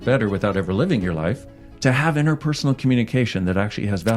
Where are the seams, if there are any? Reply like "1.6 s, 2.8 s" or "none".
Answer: 1.4 s

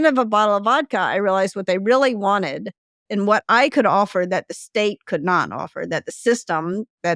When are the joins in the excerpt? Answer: none

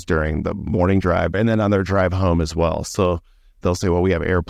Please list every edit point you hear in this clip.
1.3 s, 3.6 s

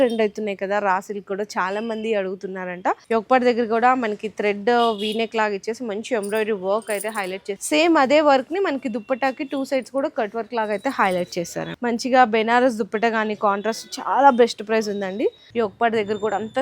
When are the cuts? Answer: 3.0 s, 7.5 s, 11.7 s, 15.4 s

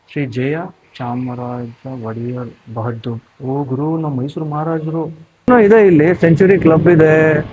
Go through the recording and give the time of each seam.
5.5 s

